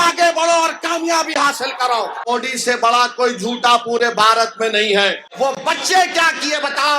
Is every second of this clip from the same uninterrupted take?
no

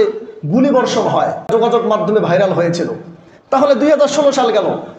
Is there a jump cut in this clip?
yes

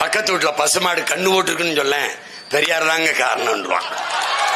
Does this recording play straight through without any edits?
yes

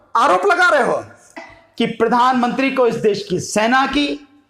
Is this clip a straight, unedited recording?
no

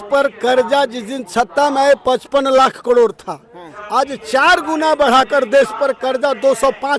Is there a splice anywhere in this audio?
no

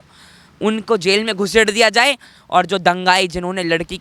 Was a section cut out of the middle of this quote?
no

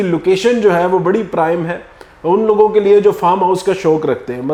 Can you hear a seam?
no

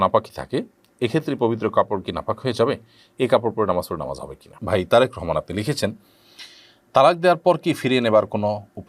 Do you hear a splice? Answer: yes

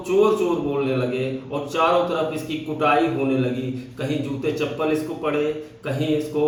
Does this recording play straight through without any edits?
yes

